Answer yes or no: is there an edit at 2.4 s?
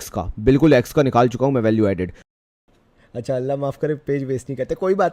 yes